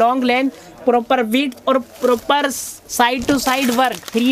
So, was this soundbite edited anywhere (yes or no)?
no